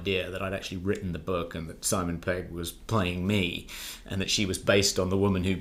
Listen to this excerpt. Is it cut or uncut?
uncut